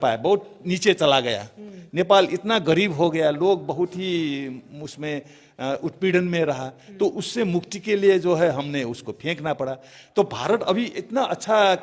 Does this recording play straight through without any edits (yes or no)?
yes